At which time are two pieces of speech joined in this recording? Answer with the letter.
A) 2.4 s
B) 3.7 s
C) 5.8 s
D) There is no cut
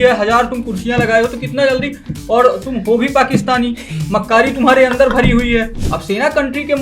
C